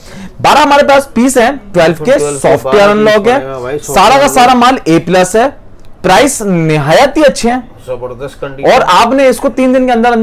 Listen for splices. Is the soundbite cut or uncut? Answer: uncut